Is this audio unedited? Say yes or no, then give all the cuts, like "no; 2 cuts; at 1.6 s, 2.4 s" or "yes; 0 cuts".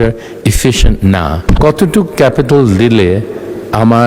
no; 1 cut; at 1.4 s